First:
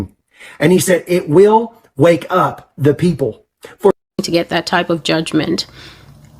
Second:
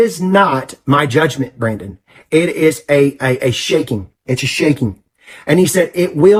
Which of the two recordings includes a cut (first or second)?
first